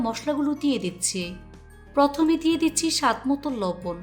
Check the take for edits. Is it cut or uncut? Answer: uncut